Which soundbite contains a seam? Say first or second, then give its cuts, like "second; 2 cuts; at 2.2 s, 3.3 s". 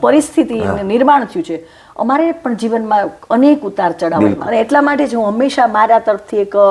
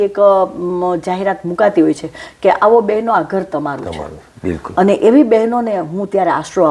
first; 1 cut; at 4.4 s